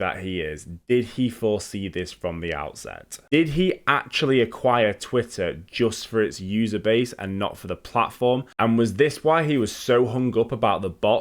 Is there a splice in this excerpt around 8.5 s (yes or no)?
yes